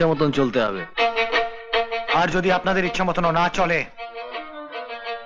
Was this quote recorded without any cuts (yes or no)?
yes